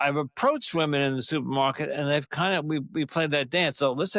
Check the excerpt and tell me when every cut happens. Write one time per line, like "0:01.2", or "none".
none